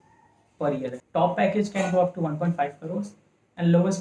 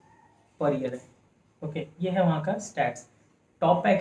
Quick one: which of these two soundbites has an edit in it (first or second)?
first